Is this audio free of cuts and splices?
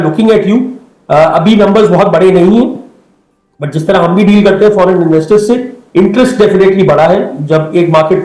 yes; 0 cuts

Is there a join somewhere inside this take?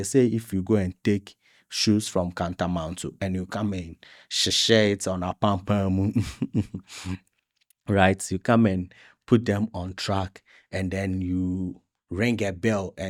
no; 0 cuts

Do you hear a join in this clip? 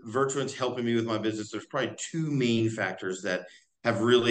no; 0 cuts

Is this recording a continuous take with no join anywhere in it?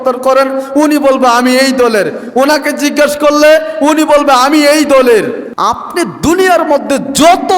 no; 1 cut; at 5.5 s

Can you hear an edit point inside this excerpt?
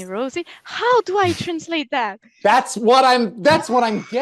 no; 0 cuts

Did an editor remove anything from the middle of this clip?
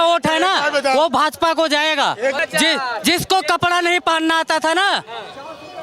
yes; 1 cut; at 2.4 s

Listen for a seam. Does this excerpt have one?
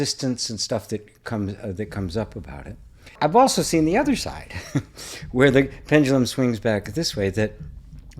yes; 1 cut; at 3.1 s

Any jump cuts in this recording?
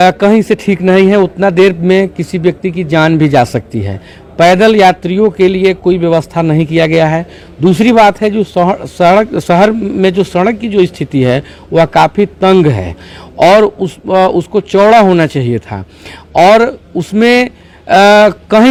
no; 0 cuts

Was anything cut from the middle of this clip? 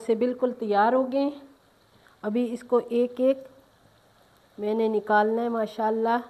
no; 0 cuts

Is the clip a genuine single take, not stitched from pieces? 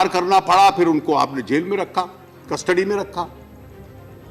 no; 1 cut; at 3.3 s

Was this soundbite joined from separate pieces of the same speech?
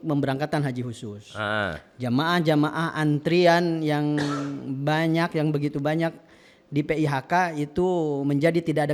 no; 0 cuts

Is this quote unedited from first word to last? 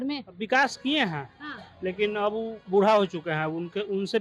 yes; 0 cuts

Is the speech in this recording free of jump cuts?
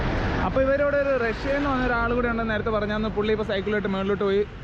yes; 0 cuts

